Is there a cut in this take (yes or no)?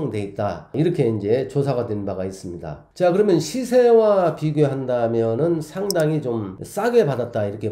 no